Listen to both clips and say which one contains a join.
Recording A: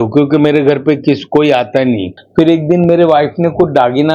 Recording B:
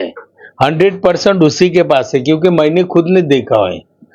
A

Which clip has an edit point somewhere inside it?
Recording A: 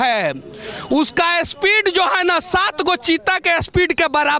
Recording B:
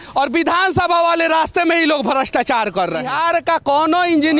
B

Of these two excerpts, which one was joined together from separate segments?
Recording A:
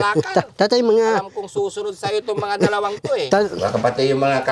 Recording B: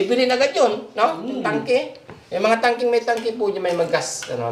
A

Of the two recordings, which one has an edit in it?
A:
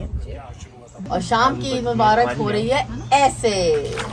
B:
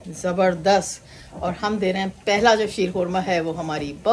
A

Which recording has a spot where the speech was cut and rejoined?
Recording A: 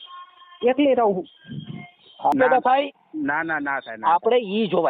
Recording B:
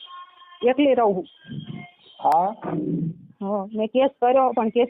A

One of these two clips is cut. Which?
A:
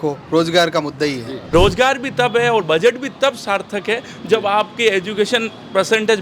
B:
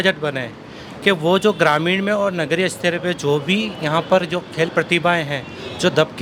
A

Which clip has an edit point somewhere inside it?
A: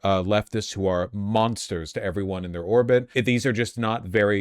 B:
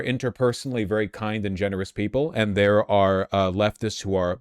A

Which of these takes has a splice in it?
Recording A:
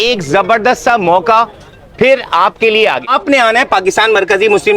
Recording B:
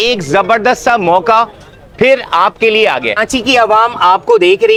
A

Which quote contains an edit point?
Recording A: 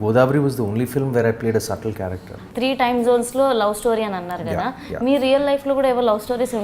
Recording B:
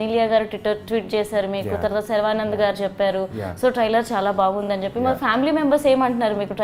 A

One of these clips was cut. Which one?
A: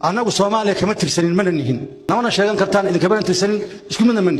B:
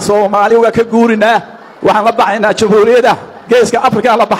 A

